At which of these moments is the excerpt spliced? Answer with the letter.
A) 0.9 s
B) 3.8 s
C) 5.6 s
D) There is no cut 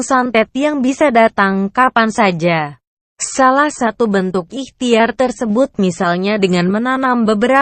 C